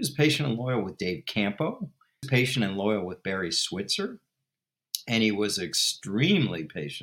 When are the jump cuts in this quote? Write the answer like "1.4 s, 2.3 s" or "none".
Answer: 2.3 s